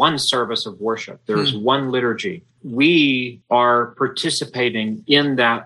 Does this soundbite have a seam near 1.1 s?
no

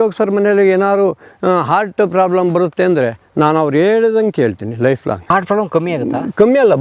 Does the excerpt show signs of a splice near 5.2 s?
yes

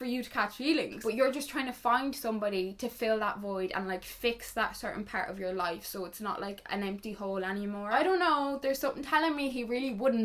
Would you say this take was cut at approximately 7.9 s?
yes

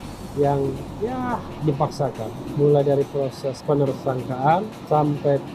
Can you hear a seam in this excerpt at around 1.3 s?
no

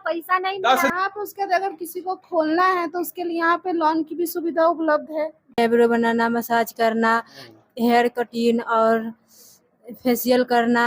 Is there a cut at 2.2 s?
no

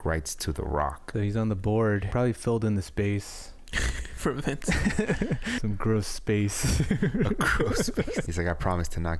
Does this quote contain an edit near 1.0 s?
yes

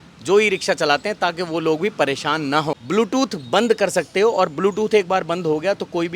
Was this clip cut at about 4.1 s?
no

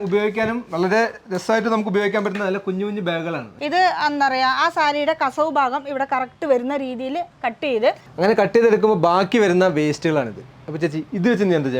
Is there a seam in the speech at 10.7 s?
no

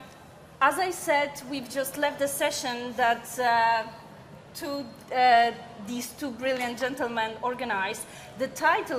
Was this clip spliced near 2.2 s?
no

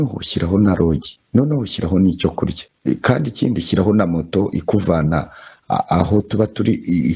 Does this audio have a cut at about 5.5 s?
no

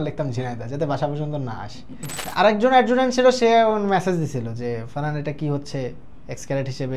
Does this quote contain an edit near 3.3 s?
no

